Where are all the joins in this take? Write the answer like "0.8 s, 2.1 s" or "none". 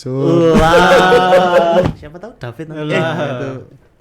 1.9 s